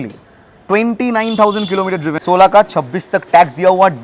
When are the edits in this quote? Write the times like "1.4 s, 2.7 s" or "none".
2.2 s